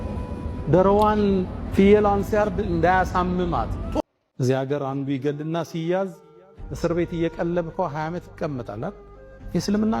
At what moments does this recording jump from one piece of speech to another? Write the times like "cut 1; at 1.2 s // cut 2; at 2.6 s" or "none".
cut 1; at 3.8 s